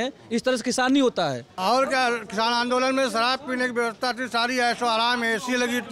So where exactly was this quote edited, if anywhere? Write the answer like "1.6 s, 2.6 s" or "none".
1.5 s